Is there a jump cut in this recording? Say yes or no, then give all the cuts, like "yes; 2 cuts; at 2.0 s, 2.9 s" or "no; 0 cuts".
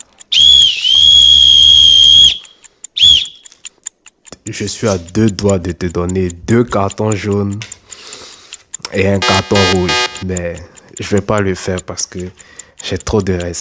no; 0 cuts